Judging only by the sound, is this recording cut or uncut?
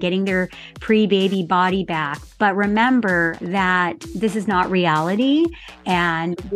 cut